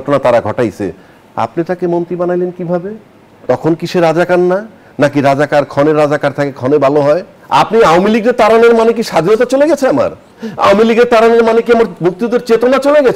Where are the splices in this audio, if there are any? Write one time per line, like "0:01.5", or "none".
0:07.3